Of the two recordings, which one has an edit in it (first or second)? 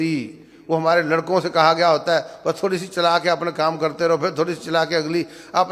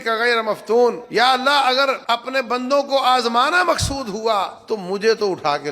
second